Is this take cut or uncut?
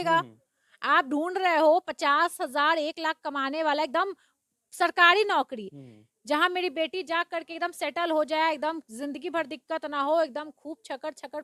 uncut